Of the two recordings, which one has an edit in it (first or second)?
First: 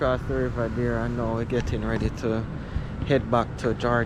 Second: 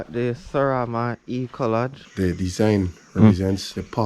second